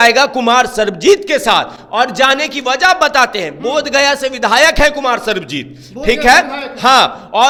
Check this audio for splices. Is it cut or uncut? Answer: uncut